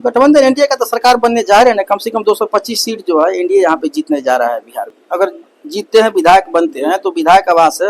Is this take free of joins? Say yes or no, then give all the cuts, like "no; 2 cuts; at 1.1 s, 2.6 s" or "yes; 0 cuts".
no; 1 cut; at 5.0 s